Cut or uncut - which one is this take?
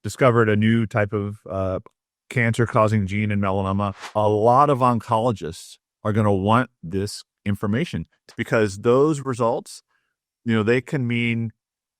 cut